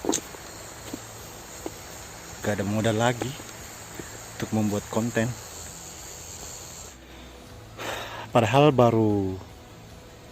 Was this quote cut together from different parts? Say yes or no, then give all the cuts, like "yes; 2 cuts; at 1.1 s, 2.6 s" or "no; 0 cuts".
yes; 1 cut; at 6.9 s